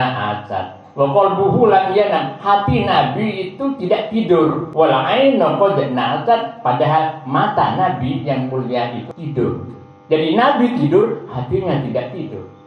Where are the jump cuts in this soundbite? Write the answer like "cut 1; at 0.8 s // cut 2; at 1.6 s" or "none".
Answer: cut 1; at 4.6 s // cut 2; at 9.1 s

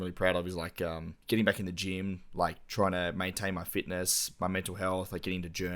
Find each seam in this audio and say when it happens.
cut 1; at 1.1 s

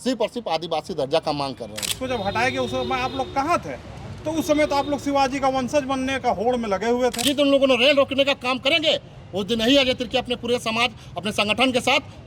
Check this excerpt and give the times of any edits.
cut 1; at 1.9 s // cut 2; at 7.2 s

